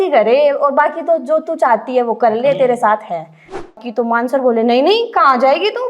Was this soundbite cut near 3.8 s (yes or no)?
yes